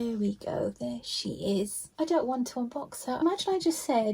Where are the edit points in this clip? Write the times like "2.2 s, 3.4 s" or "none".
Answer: 1.8 s, 3.2 s